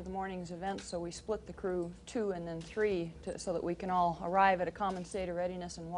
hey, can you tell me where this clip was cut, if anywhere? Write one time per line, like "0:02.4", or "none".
0:01.3